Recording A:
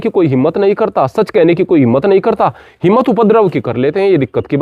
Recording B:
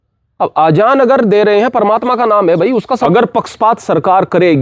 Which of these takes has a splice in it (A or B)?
B